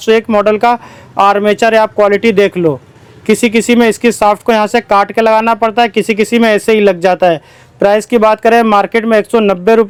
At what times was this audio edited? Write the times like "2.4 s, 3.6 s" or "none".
none